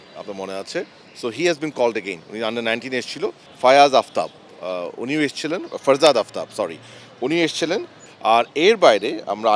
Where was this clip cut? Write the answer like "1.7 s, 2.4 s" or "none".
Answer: 3.5 s, 8.0 s